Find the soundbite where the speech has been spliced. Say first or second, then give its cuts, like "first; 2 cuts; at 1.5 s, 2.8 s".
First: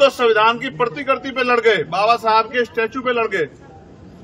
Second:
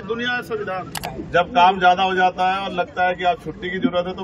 second; 1 cut; at 1.0 s